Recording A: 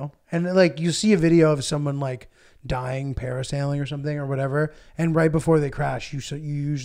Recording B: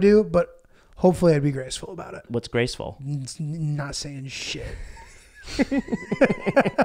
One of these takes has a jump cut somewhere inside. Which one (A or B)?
B